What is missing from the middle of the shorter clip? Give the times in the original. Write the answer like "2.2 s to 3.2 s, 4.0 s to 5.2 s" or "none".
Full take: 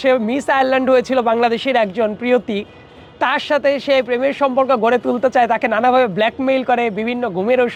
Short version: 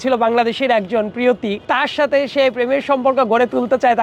2.6 s to 3.1 s